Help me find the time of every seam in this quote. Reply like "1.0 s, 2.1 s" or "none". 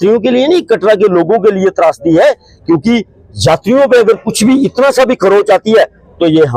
none